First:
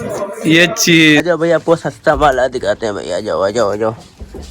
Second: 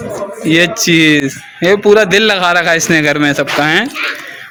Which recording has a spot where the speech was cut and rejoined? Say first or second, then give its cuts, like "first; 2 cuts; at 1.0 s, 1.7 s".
first; 1 cut; at 1.2 s